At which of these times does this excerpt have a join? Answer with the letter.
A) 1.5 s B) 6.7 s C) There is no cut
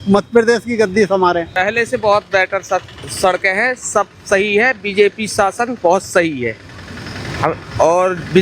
A